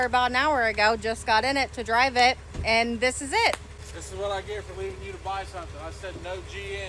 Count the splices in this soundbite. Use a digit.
0